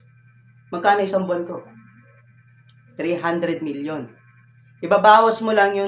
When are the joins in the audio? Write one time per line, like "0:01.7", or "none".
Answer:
none